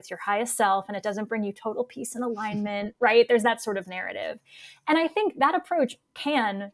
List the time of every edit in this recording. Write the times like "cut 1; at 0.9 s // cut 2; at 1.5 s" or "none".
none